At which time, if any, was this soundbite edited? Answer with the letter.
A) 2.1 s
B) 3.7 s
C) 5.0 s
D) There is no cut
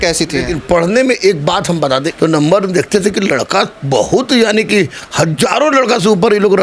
A